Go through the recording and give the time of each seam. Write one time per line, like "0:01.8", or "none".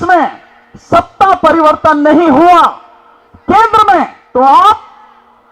0:04.2

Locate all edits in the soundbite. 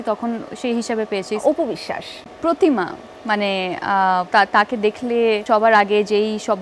0:01.4
0:04.3
0:05.4

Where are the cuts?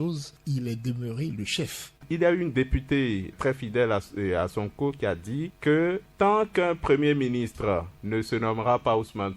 0:02.0
0:03.3

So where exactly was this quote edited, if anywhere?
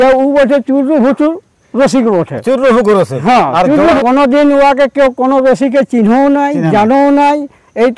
0:04.0

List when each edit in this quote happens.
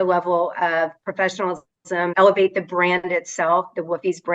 0:02.1

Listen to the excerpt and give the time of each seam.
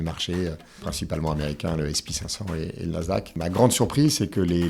0:00.9
0:03.4

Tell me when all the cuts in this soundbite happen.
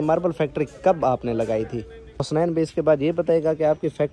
0:02.3

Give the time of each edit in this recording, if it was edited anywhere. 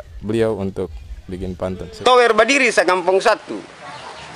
0:01.9

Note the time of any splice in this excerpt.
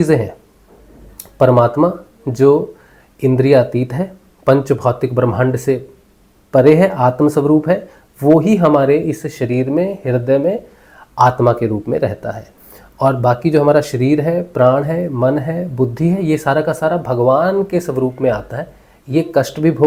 none

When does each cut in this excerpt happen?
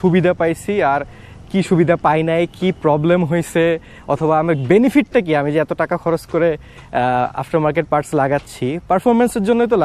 none

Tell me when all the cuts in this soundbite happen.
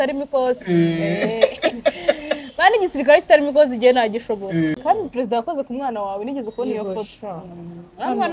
0:04.8

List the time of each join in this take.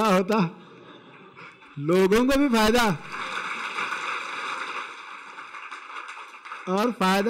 0:05.5

